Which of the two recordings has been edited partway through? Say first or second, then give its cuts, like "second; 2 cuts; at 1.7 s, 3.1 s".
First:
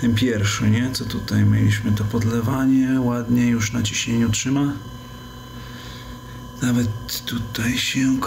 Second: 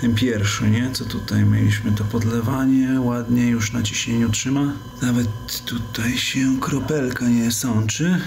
second; 1 cut; at 4.9 s